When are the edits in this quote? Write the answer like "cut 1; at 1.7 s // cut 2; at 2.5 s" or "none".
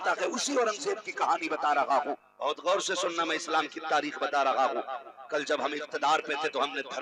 cut 1; at 2.3 s